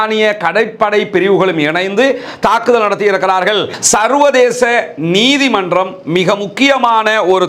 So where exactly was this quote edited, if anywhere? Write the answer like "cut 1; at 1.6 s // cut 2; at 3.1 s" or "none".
cut 1; at 3.7 s